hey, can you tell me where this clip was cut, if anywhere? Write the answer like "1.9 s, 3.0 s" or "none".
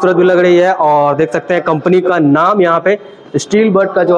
none